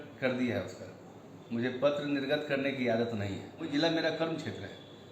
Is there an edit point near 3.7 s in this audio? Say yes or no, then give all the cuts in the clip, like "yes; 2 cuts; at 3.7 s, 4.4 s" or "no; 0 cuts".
yes; 1 cut; at 3.7 s